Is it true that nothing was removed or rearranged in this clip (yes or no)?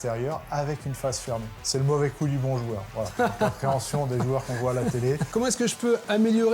no